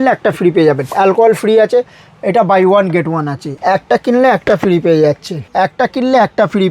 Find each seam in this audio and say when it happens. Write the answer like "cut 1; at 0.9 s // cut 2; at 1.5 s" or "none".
cut 1; at 0.9 s // cut 2; at 3.4 s // cut 3; at 5.3 s